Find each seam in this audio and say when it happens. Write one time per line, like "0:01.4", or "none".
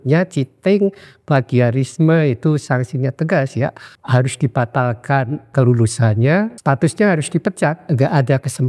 0:03.9
0:05.5
0:06.6
0:07.8